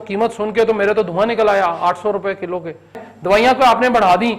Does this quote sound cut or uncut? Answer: cut